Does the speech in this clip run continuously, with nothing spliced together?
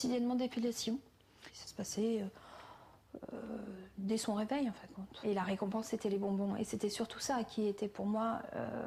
yes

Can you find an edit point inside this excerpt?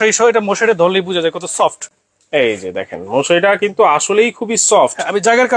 no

